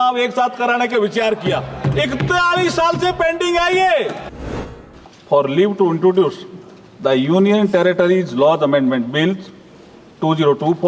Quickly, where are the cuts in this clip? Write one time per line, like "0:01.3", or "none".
0:04.5